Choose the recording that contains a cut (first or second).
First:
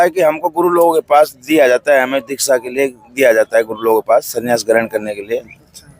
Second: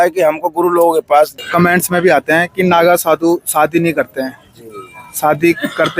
second